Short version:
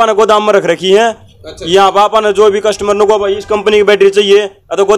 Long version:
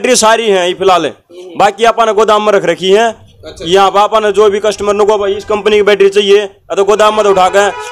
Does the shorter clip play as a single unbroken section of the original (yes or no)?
yes